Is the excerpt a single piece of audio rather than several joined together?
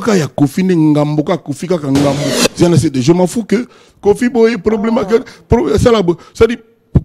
no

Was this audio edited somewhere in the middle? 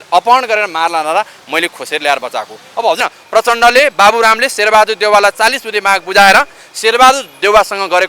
yes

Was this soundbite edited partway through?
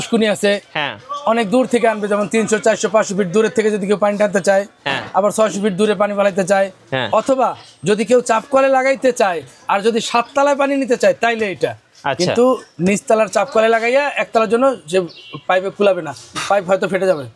no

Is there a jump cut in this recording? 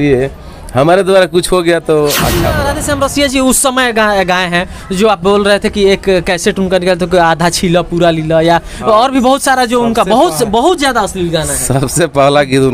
yes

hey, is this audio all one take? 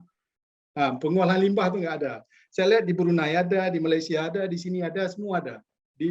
yes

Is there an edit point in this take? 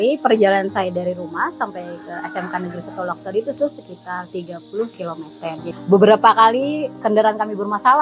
yes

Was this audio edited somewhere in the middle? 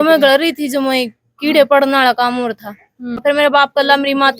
yes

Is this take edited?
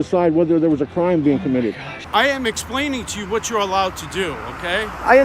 yes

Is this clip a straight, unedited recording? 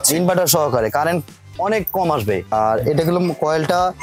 no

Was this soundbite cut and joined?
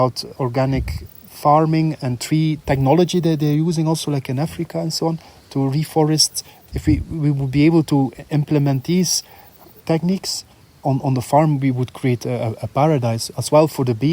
yes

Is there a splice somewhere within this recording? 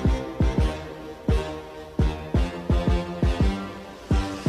no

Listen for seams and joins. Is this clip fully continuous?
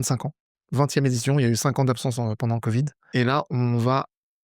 no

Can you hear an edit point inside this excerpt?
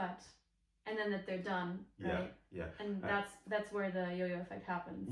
no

